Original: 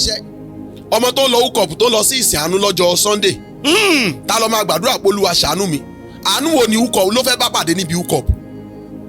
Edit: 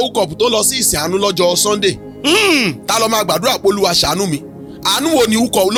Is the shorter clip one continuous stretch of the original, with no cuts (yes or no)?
yes